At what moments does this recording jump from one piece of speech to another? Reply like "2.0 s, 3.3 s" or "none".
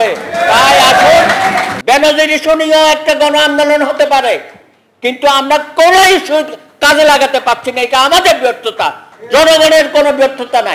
1.7 s